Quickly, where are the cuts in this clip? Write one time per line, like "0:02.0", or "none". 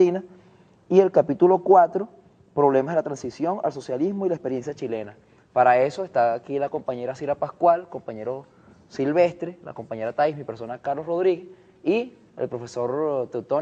0:04.3